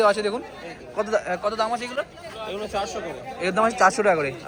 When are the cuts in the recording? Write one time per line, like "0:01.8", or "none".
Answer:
none

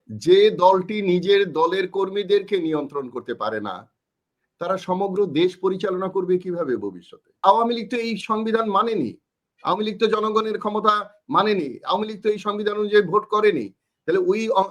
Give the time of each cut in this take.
0:07.4

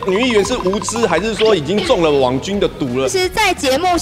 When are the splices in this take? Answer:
0:03.1

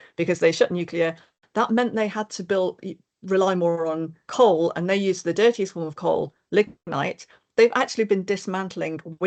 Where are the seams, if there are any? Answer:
none

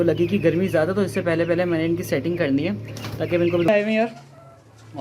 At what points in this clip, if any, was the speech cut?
0:03.7

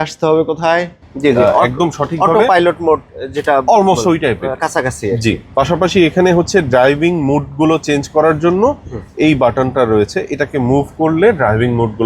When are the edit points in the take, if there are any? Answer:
0:01.0

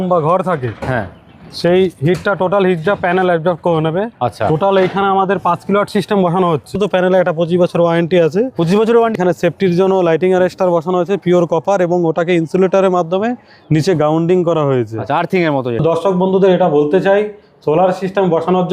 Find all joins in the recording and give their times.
0:06.8
0:09.1
0:15.8

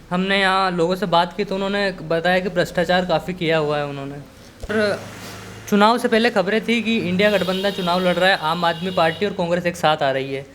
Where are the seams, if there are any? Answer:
0:04.7

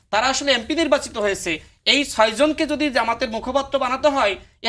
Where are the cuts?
none

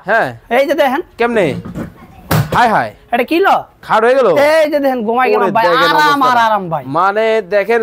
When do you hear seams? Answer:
none

